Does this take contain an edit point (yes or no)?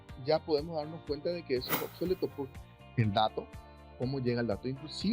yes